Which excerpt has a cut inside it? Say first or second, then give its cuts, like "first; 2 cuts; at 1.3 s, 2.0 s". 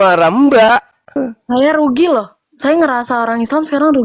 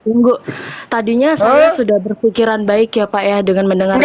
first; 1 cut; at 1.3 s